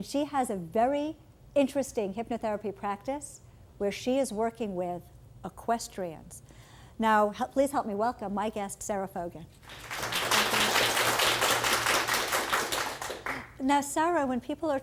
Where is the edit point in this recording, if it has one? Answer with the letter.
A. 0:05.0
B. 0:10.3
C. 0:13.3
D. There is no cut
B